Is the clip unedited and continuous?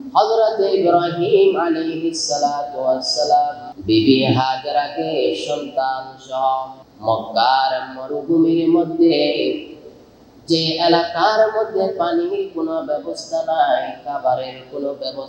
no; 2 cuts; at 3.7 s, 6.8 s

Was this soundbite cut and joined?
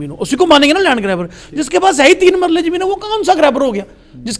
no; 0 cuts

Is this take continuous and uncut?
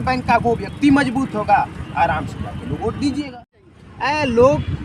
no; 1 cut; at 3.4 s

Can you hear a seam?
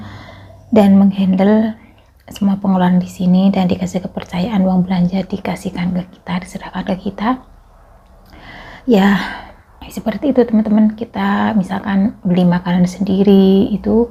no; 0 cuts

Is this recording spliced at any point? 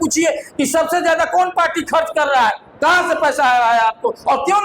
no; 0 cuts

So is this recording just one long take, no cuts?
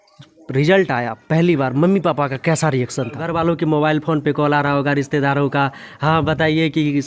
no; 1 cut; at 3.2 s

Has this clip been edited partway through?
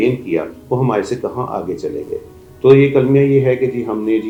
no; 0 cuts

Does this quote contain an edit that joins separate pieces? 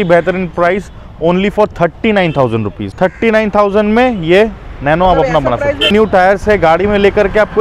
yes; 2 cuts; at 2.8 s, 5.9 s

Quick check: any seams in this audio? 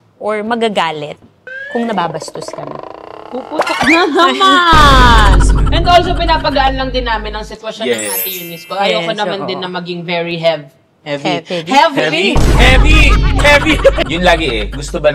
yes; 2 cuts; at 5.5 s, 14.1 s

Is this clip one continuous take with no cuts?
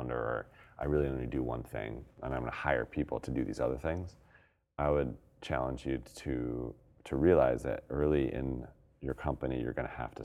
no; 3 cuts; at 2.1 s, 5.3 s, 6.9 s

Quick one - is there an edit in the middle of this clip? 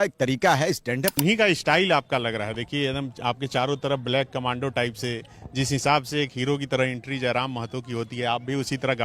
yes; 1 cut; at 1.1 s

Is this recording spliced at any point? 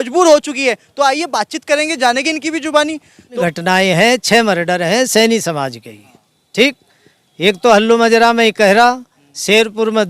yes; 1 cut; at 3.4 s

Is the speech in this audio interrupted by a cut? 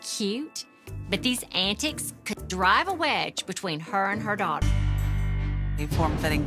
yes; 1 cut; at 4.6 s

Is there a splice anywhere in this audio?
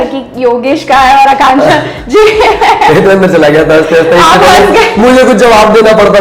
no; 0 cuts

